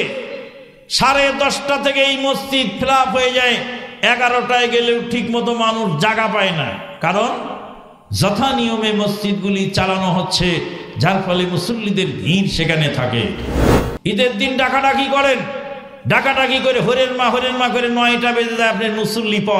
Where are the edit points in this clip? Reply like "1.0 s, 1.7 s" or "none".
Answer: 13.5 s